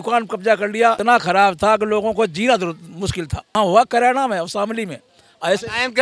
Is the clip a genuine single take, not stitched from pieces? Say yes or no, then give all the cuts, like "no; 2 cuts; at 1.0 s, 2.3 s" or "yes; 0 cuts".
no; 2 cuts; at 1.0 s, 3.6 s